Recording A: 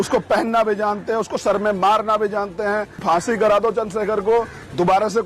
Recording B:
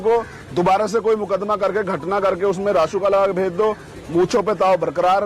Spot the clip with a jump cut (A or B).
A